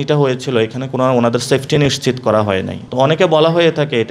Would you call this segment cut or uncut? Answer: cut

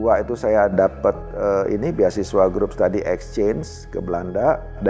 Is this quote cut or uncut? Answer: uncut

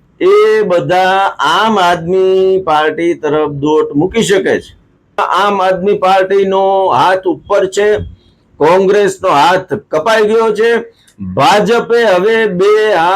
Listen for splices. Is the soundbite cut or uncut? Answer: cut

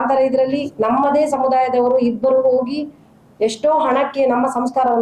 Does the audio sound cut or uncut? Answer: uncut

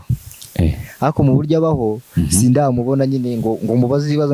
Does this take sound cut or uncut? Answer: uncut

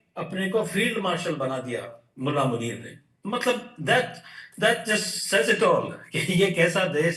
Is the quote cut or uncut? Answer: uncut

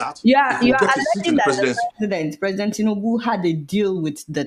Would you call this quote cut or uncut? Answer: uncut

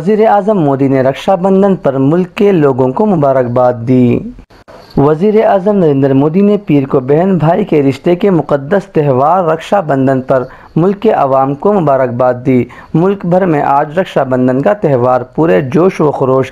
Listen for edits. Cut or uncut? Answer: uncut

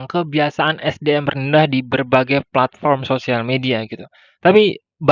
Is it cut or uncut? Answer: uncut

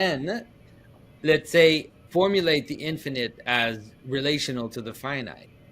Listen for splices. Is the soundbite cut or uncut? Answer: cut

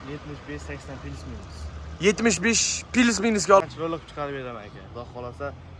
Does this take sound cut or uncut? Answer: cut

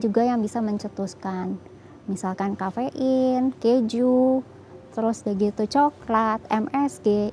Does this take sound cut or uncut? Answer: uncut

